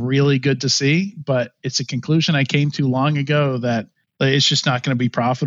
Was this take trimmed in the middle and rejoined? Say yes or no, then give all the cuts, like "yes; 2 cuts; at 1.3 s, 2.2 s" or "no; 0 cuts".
yes; 1 cut; at 4.0 s